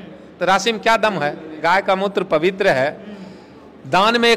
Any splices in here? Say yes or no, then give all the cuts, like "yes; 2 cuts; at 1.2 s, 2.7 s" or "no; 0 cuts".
no; 0 cuts